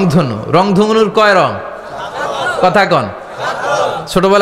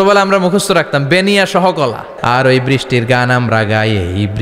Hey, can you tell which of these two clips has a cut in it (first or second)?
second